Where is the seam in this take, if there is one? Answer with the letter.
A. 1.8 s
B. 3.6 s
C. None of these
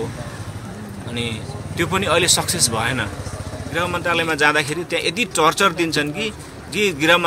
B